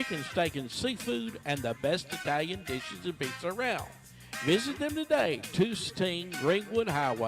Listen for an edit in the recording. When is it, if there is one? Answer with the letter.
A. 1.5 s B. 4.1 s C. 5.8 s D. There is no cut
C